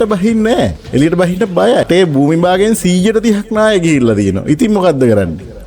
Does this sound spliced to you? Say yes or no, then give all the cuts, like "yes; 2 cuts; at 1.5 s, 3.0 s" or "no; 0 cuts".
yes; 1 cut; at 1.9 s